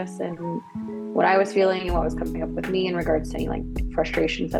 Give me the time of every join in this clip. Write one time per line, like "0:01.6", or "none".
none